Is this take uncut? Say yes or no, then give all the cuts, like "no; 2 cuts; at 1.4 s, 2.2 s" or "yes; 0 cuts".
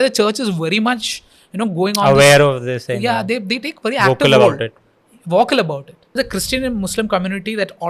no; 1 cut; at 6.2 s